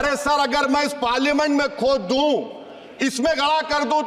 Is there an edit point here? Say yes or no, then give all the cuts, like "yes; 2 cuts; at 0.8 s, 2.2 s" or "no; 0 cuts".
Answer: no; 0 cuts